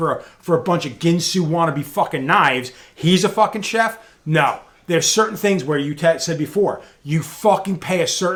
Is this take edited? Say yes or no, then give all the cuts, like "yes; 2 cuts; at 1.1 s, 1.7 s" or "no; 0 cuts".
no; 0 cuts